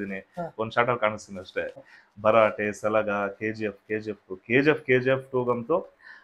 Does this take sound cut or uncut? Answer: cut